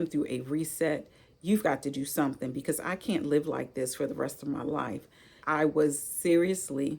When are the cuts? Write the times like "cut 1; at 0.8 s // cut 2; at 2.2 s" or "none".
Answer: cut 1; at 5.4 s